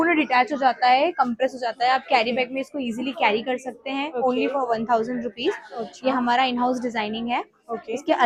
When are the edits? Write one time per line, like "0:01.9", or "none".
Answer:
none